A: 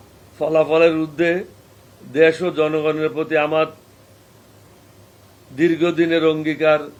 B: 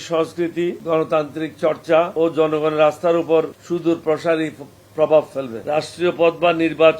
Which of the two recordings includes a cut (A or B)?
B